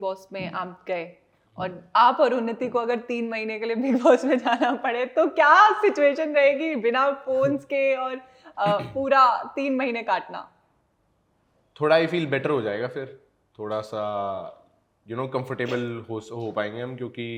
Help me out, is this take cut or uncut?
uncut